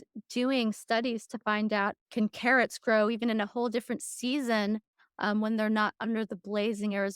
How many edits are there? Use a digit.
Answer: 1